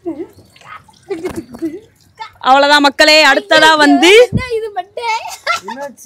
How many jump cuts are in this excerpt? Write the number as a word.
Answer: one